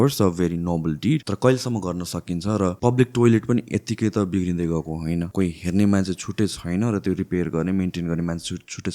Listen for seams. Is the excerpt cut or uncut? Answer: cut